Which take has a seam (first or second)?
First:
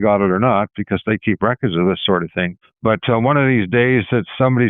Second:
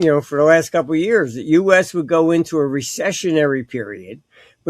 first